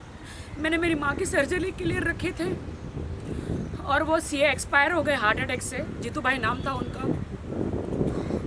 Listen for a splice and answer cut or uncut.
uncut